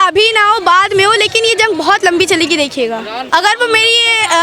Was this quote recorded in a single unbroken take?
no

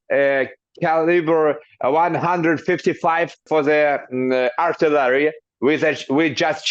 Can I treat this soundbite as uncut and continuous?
yes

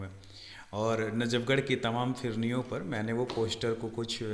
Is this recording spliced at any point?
no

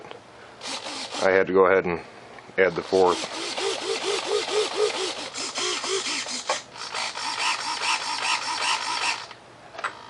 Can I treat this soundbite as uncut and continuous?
no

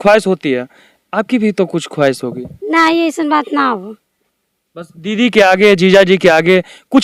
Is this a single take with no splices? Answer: yes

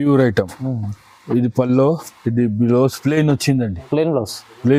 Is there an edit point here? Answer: no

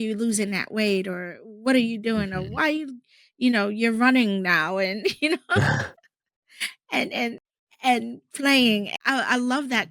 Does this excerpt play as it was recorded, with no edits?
no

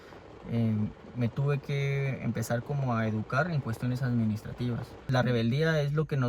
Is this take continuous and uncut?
no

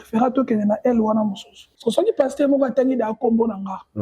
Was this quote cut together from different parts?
yes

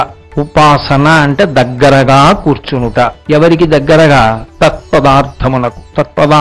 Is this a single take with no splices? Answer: yes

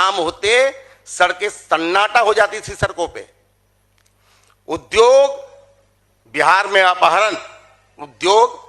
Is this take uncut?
yes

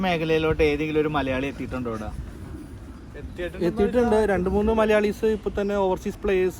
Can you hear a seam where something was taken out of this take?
no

